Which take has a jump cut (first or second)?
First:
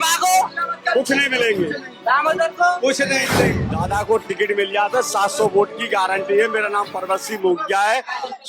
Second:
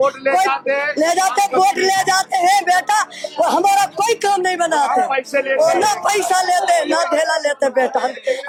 first